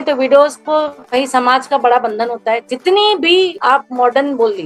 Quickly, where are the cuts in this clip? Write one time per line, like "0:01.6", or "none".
none